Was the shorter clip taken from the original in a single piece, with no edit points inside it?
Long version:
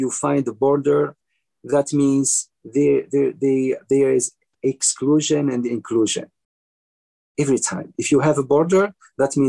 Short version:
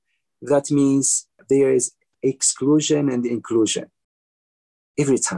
no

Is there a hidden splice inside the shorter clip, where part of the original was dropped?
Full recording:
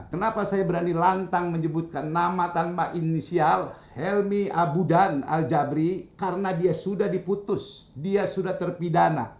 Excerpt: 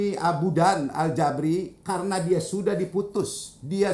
no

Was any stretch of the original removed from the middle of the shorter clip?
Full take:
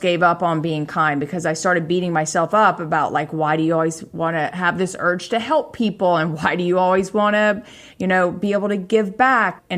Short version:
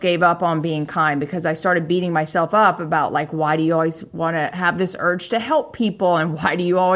no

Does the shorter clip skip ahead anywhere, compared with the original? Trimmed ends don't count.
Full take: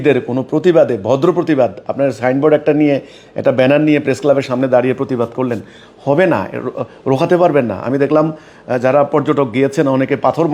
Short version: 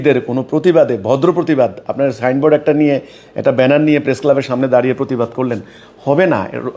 no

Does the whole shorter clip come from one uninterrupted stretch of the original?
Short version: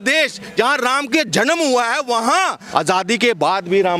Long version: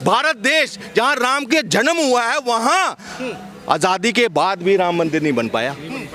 no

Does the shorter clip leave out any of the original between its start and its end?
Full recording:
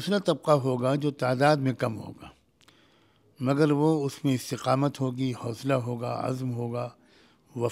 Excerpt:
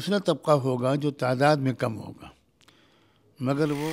no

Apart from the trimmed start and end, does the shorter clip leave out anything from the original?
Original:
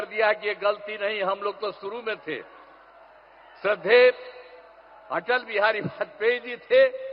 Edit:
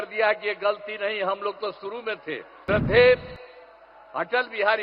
yes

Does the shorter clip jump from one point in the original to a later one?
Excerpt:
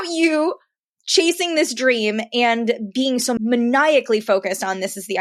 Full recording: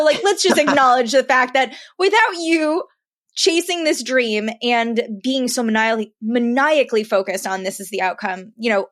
yes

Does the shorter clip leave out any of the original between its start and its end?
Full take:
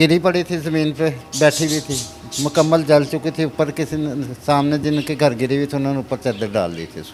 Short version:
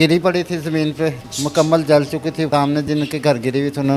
yes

